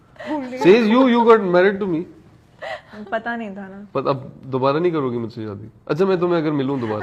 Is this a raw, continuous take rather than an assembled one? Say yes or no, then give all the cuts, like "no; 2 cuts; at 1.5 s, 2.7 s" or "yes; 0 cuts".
yes; 0 cuts